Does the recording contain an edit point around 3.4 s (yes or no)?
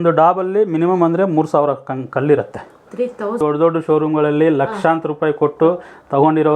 yes